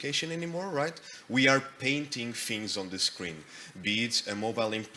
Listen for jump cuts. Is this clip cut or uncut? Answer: uncut